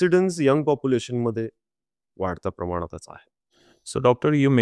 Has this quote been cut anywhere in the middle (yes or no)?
no